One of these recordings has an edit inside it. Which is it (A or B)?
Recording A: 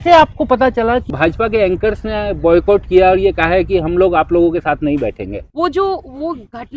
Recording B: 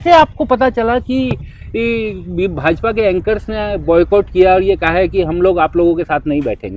A